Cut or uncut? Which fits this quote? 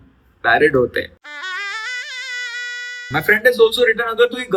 cut